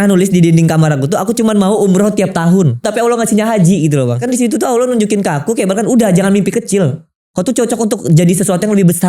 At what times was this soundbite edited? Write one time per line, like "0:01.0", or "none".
0:02.9
0:04.2